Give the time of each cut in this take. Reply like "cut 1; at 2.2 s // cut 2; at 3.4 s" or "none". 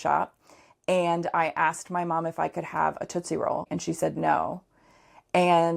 cut 1; at 3.7 s